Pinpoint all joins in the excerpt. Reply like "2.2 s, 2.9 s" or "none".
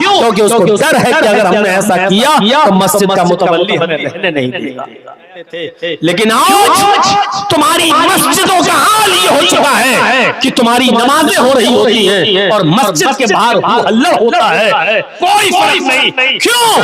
5.6 s

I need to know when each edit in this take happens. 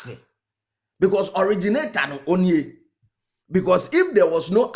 none

